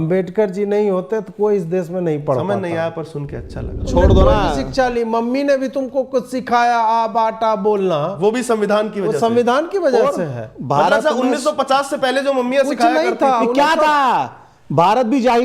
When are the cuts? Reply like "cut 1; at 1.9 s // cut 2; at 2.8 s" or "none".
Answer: cut 1; at 3.9 s